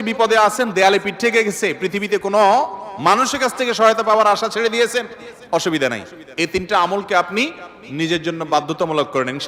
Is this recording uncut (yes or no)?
yes